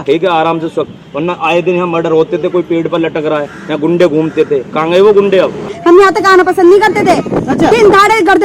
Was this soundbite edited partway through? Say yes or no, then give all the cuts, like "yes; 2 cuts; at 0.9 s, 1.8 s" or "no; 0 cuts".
yes; 1 cut; at 5.7 s